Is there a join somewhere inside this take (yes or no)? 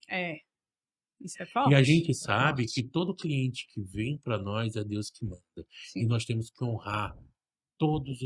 no